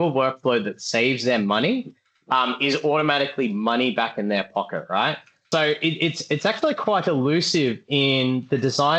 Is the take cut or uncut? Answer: cut